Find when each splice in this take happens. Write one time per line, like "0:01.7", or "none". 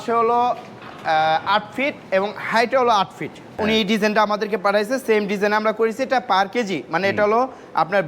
0:03.6

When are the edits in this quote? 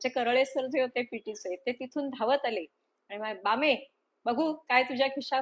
none

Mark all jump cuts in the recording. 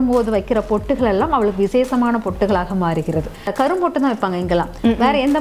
0:03.5

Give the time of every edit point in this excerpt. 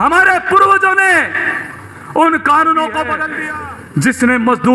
0:03.2

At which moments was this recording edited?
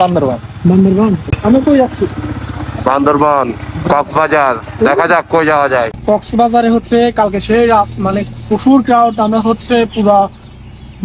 0:01.2
0:05.9

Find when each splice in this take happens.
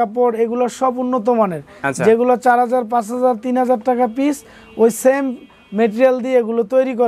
none

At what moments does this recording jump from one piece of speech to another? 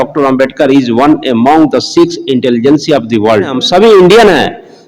0:03.6

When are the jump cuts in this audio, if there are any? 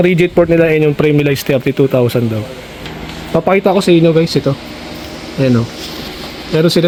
none

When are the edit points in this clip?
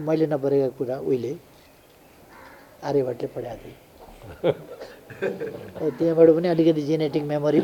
none

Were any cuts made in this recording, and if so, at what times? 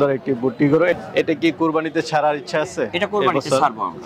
0:01.0

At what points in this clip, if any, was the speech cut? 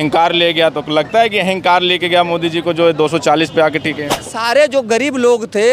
0:04.4

